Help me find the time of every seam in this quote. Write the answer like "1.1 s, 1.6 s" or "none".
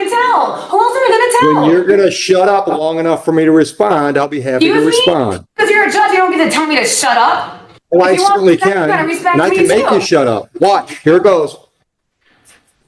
none